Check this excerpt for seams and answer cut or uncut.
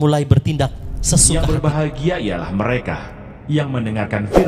cut